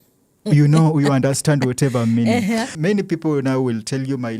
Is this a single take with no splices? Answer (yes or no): no